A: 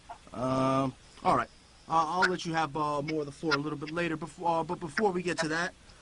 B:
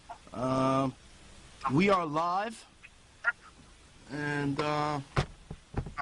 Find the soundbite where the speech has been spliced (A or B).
B